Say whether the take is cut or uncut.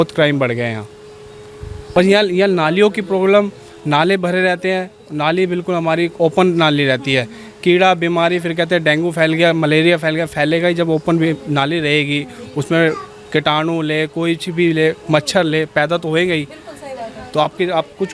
cut